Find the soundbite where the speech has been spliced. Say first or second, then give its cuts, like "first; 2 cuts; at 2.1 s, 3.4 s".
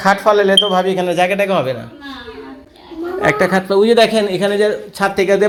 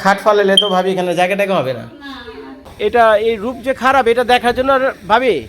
second; 1 cut; at 2.7 s